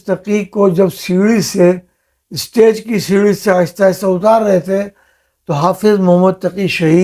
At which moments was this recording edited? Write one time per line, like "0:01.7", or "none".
none